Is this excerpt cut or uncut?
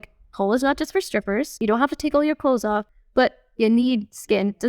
cut